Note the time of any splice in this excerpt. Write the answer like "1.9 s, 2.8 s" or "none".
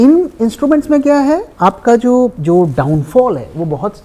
1.5 s, 2.4 s

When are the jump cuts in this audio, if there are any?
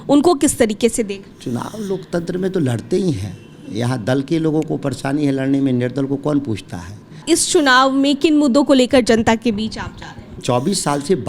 1.3 s, 7.2 s, 10.4 s

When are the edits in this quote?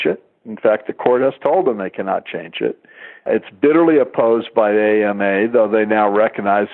none

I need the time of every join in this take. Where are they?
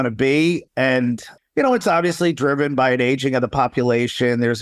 none

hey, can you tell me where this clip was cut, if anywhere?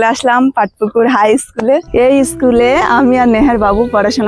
1.9 s

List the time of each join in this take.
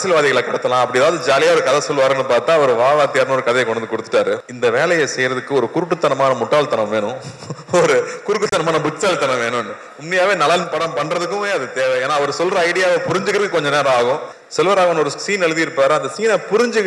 4.5 s, 14.4 s

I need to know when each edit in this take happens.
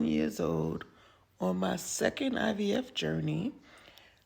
1.1 s

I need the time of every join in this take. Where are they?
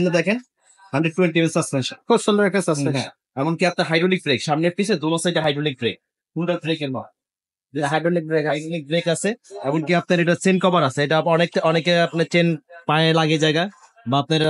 none

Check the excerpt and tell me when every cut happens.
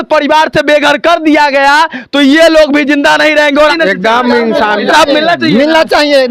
3.6 s

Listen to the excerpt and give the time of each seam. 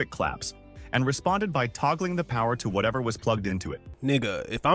3.8 s

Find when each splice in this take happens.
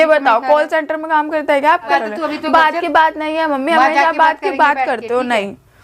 1.9 s

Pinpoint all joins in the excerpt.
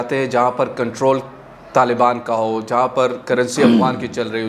none

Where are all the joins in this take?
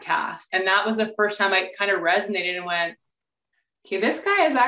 none

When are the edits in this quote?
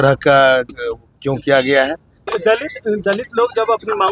2.3 s

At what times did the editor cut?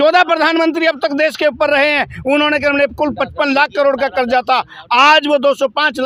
none

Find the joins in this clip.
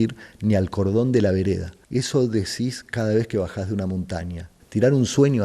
1.7 s, 4.5 s

